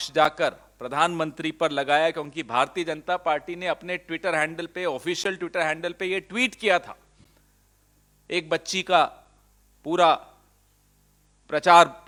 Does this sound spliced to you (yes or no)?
no